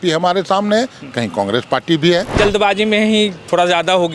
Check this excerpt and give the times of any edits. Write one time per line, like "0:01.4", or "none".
0:02.4